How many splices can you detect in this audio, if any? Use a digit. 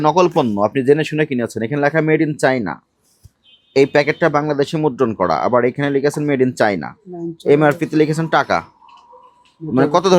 0